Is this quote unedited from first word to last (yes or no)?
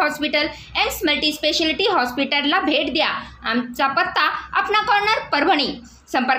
no